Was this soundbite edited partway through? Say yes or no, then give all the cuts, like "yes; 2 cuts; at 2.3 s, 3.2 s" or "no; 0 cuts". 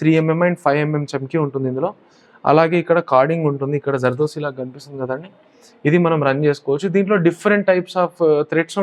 no; 0 cuts